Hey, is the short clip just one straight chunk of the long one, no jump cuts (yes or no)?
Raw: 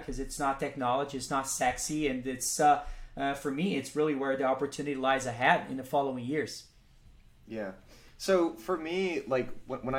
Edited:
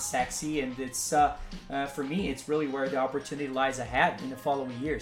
yes